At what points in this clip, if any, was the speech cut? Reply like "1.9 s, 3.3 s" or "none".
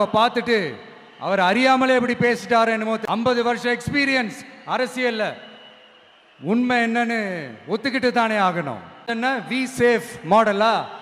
3.1 s, 9.1 s